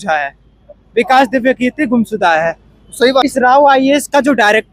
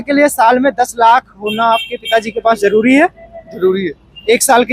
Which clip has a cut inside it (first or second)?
first